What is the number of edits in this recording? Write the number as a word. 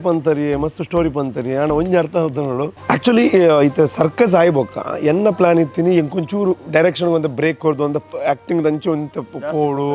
one